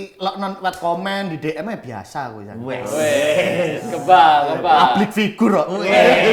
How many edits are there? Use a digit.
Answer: 0